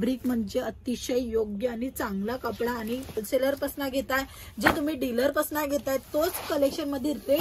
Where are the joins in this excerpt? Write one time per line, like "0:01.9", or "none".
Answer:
0:03.2